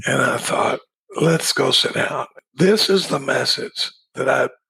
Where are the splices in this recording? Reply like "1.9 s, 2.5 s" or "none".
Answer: 1.0 s, 2.3 s